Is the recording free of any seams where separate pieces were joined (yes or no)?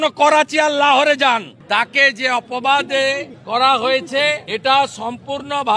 no